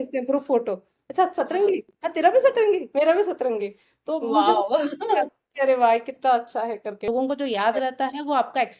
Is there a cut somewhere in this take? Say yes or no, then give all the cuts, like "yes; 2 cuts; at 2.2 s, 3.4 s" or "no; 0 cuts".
yes; 1 cut; at 7.0 s